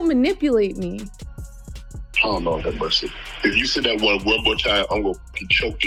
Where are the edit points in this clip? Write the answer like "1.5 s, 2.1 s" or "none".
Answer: none